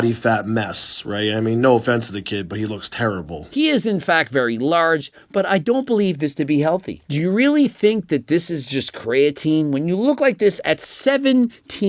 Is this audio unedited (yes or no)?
no